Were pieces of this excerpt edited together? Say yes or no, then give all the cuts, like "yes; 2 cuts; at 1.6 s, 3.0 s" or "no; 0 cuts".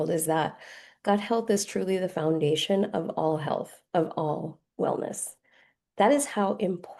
no; 0 cuts